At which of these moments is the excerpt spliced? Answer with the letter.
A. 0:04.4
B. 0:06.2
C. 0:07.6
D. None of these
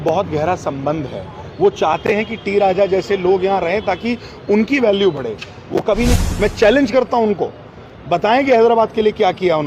B